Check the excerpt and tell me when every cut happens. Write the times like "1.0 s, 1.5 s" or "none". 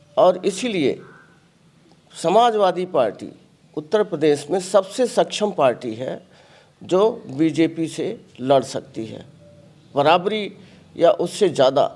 none